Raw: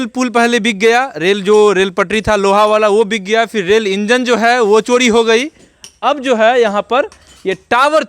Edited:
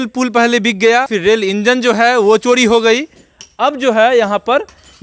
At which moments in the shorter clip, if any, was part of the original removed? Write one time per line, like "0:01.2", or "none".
0:01.1